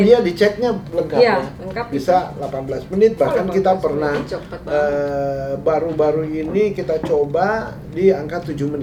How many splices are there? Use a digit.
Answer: 0